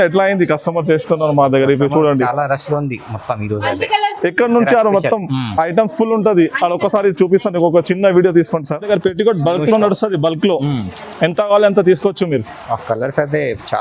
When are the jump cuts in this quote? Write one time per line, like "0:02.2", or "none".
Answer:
0:08.9